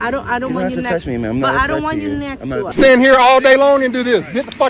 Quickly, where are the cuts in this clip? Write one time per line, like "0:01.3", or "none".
0:02.7